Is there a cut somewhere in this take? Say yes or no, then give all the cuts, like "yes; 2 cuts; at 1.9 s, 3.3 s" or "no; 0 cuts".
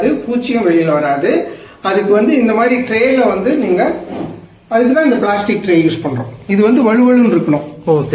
no; 0 cuts